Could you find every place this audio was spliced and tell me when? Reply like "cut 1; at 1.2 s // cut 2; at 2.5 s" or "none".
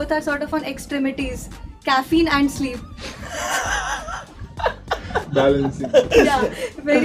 none